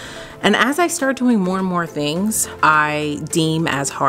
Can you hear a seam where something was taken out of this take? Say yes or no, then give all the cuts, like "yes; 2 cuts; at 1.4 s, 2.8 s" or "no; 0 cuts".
yes; 1 cut; at 2.5 s